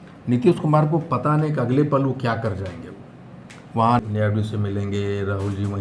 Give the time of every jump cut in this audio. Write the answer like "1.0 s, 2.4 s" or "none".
none